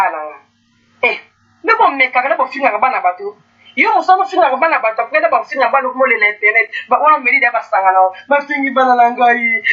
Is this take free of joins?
yes; 0 cuts

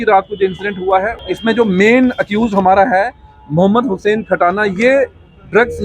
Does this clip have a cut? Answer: yes; 1 cut; at 1.2 s

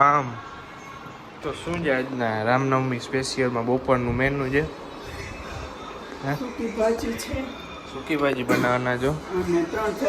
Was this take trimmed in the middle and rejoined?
yes; 1 cut; at 1.3 s

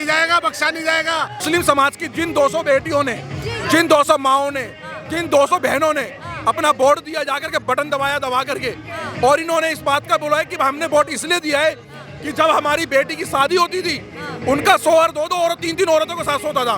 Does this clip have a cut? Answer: yes; 1 cut; at 1.4 s

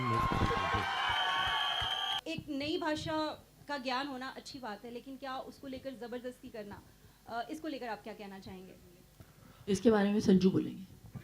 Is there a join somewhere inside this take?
yes; 1 cut; at 2.2 s

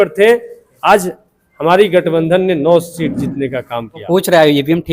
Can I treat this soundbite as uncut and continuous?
no; 1 cut; at 4.0 s

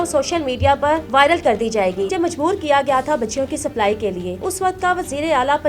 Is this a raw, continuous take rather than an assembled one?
no; 3 cuts; at 1.0 s, 2.1 s, 4.5 s

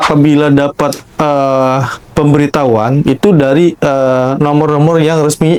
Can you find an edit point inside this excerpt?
no; 0 cuts

